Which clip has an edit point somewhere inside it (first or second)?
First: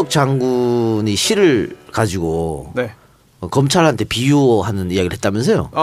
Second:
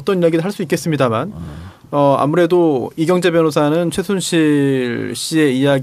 second